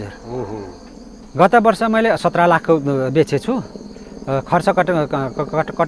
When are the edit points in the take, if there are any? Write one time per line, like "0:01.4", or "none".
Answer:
0:01.2